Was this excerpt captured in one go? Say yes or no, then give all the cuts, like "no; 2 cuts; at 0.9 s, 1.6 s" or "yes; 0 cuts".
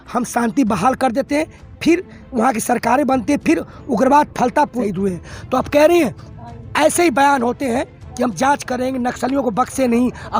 no; 1 cut; at 4.8 s